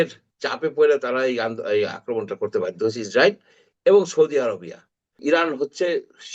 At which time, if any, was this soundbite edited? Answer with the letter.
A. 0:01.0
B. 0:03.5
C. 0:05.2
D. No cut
C